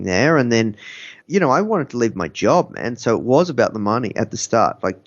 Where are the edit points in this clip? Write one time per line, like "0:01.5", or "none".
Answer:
0:01.2